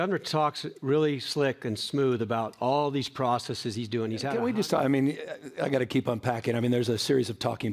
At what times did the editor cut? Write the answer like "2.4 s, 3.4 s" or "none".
4.3 s